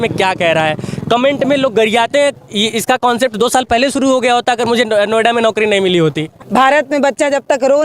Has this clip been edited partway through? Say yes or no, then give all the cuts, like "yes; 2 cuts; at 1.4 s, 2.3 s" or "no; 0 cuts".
yes; 2 cuts; at 2.3 s, 6.3 s